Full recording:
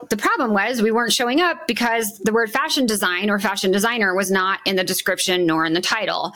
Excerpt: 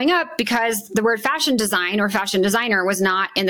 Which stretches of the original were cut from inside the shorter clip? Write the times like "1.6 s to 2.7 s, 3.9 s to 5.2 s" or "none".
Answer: none